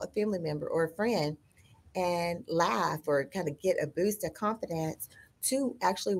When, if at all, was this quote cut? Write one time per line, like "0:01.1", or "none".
none